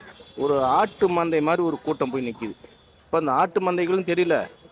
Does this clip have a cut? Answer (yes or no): no